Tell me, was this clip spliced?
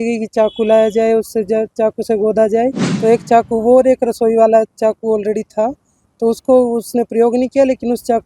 yes; 1 cut; at 2.9 s

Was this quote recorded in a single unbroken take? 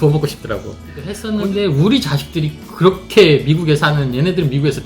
no; 1 cut; at 1.2 s

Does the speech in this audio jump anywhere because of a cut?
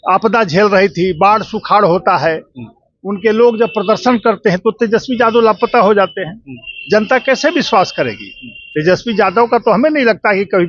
no; 0 cuts

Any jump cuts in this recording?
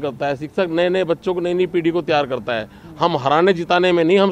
no; 0 cuts

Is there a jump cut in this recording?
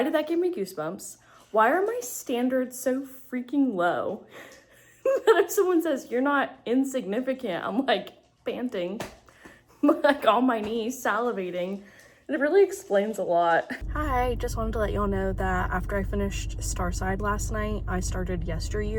no; 0 cuts

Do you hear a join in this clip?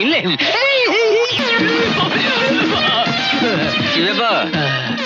yes; 1 cut; at 1.4 s

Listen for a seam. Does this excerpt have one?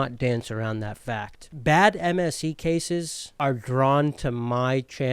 yes; 2 cuts; at 1.4 s, 3.2 s

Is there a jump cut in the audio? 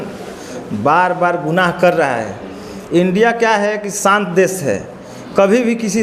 no; 0 cuts

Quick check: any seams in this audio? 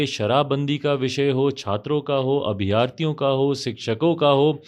no; 0 cuts

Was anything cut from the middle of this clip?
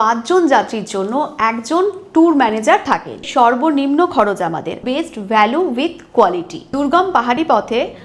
yes; 3 cuts; at 3.2 s, 4.8 s, 6.6 s

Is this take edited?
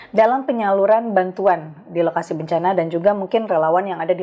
no; 0 cuts

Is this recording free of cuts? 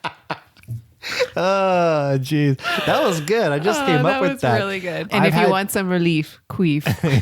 no; 1 cut; at 5.1 s

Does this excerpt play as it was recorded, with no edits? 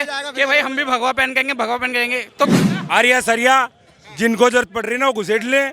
no; 1 cut; at 2.6 s

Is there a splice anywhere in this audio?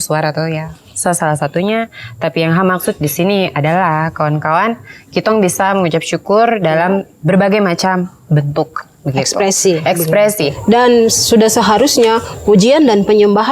yes; 1 cut; at 10.5 s

